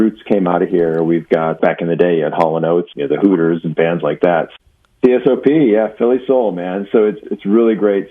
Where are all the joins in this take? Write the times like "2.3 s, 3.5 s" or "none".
1.6 s, 2.9 s, 4.5 s, 7.2 s